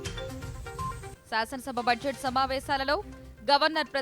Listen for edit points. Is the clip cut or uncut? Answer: cut